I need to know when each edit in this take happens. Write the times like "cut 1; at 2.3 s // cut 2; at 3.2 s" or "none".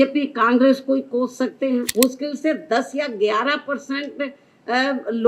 cut 1; at 1.9 s